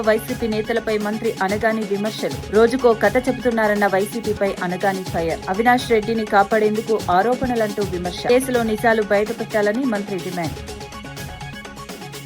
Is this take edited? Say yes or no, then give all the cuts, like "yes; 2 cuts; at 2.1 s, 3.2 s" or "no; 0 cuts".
no; 0 cuts